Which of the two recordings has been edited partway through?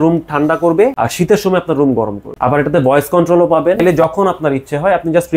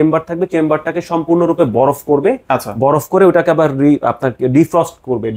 first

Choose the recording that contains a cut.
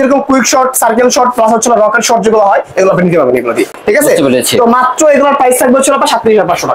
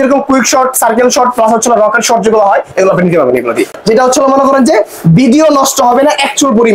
second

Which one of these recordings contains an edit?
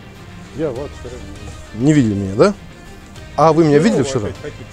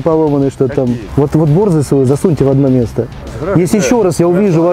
second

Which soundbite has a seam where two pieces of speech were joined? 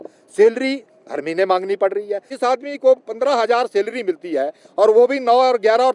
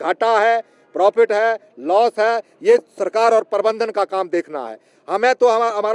first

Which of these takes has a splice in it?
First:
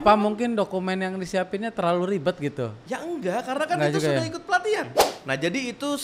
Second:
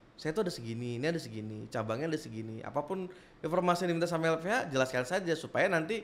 first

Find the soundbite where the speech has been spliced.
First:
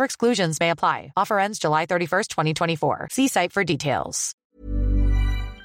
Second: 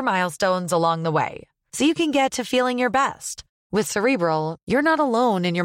first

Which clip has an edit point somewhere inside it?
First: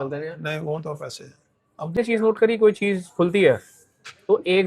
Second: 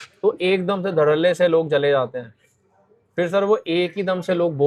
first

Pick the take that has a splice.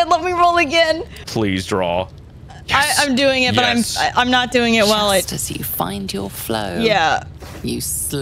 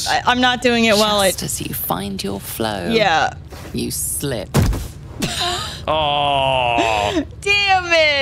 first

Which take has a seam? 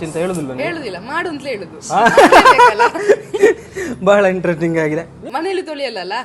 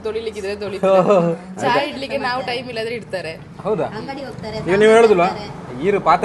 first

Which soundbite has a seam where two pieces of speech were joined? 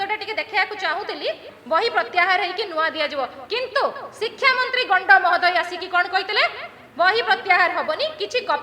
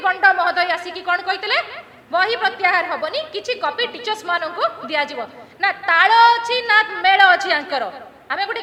first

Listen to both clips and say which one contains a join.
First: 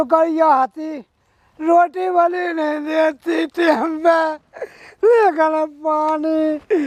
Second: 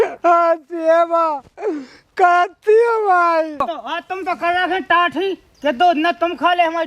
second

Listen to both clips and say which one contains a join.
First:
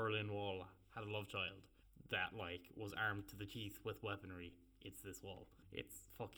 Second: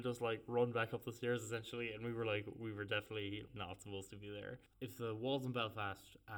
second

